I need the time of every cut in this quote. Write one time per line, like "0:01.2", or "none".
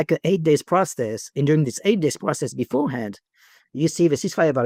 none